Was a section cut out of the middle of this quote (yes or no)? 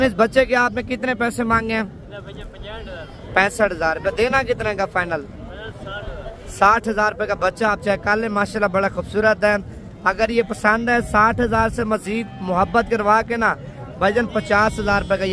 no